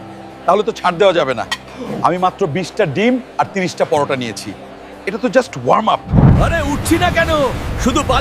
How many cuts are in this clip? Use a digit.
1